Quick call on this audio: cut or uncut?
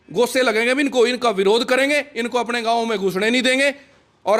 uncut